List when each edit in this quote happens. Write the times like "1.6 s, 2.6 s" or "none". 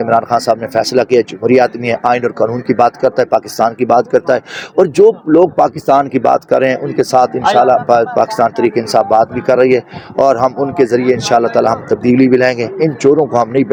none